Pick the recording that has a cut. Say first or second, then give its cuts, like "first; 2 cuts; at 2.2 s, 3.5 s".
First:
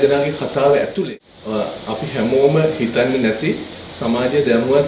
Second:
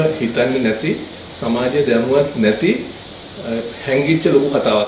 first; 1 cut; at 1.1 s